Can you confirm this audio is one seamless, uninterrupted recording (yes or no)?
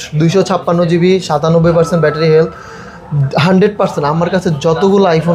yes